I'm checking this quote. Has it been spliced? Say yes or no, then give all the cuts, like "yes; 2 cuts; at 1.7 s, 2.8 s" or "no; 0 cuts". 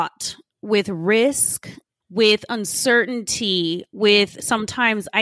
no; 0 cuts